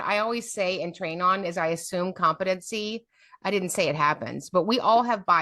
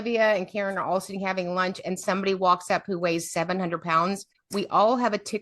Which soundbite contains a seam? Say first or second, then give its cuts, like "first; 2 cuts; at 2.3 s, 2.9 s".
second; 1 cut; at 4.3 s